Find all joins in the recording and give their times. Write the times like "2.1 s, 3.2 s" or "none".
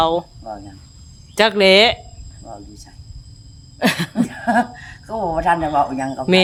none